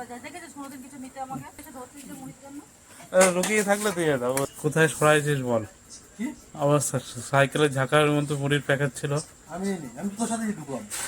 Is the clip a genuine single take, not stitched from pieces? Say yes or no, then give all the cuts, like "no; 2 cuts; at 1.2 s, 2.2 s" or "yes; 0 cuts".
no; 2 cuts; at 1.6 s, 4.5 s